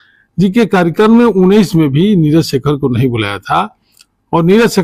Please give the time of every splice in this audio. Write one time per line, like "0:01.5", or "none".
none

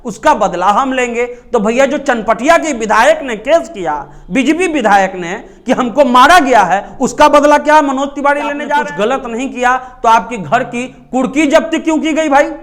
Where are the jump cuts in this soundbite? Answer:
0:08.7

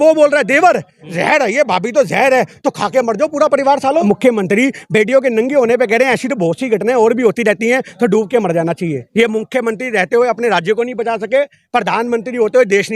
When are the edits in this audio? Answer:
0:04.0
0:09.0

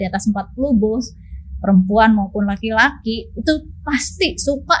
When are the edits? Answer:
none

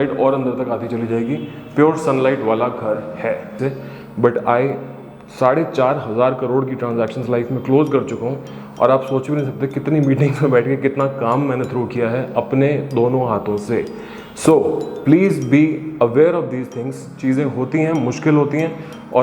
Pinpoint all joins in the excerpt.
0:03.5

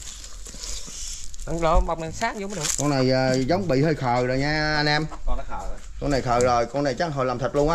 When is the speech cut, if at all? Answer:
none

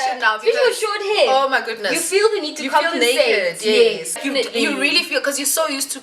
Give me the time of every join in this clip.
0:04.2

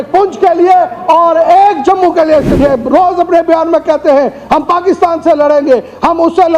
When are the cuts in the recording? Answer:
0:02.5

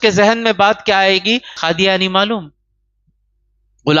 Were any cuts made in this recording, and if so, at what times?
0:01.5

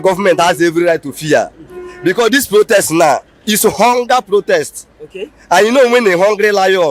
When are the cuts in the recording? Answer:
none

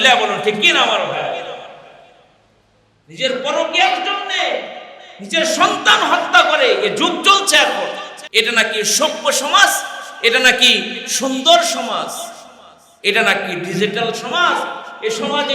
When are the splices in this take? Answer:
0:08.1

